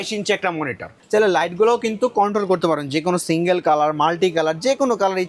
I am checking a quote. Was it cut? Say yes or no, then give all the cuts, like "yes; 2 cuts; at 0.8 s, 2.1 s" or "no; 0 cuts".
yes; 1 cut; at 1.0 s